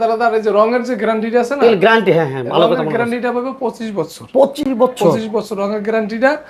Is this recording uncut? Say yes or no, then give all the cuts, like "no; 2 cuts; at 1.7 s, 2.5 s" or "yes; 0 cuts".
yes; 0 cuts